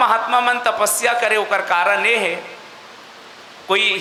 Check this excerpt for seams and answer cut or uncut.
uncut